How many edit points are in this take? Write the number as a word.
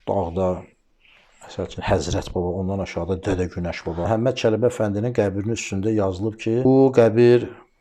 two